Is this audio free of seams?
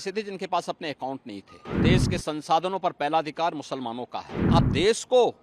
no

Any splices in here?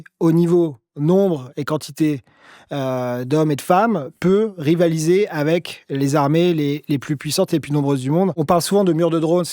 yes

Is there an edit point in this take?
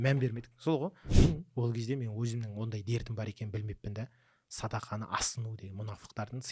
yes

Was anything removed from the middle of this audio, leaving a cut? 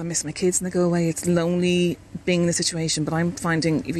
yes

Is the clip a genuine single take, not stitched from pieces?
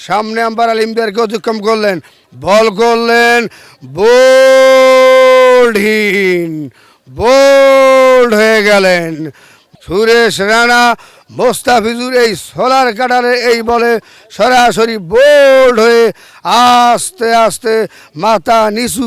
yes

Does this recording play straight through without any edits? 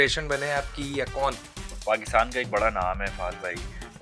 no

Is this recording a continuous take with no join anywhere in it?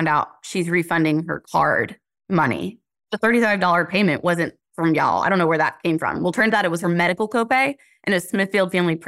yes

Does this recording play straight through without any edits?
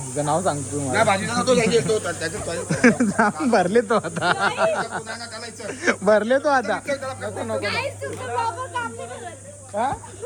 yes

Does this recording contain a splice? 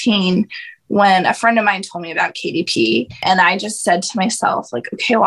yes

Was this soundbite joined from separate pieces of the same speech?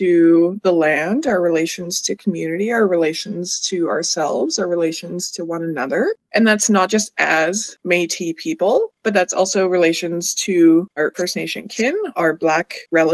yes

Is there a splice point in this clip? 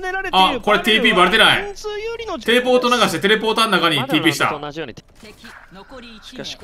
yes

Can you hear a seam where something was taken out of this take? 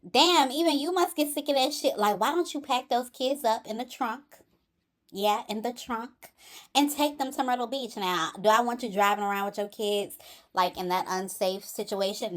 no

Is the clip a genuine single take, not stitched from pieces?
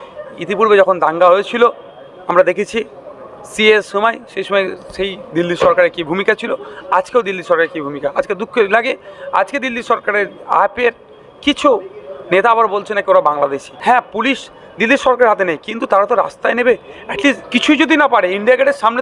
no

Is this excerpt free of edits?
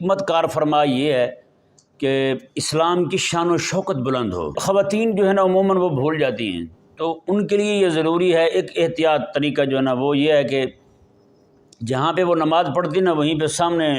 no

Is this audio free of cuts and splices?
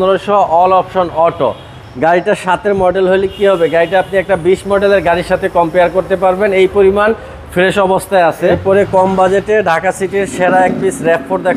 no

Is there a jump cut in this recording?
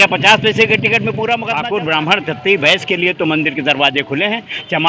yes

